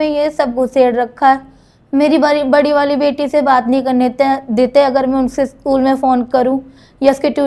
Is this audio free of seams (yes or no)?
yes